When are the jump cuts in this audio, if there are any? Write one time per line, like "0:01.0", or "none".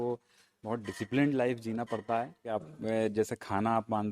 0:02.7